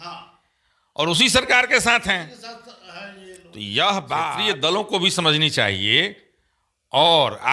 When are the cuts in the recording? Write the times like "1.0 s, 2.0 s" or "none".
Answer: 4.4 s